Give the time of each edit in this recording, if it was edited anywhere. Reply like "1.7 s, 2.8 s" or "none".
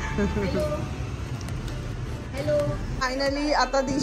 2.9 s